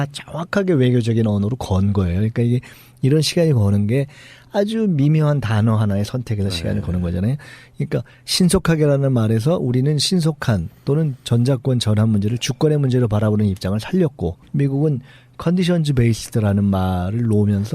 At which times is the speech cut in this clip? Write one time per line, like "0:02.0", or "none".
0:09.1